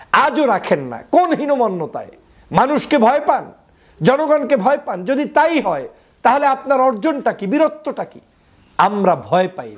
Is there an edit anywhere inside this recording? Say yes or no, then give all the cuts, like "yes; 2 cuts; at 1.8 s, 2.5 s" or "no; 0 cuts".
no; 0 cuts